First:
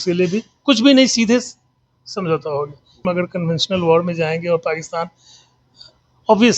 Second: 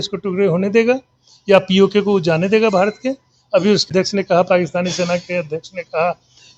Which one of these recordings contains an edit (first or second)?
first